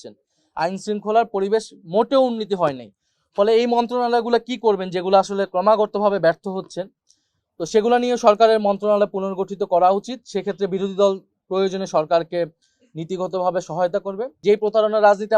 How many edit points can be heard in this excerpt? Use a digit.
1